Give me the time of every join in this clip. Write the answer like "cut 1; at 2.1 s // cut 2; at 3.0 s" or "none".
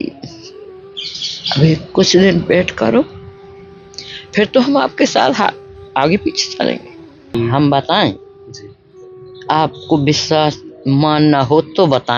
cut 1; at 7.4 s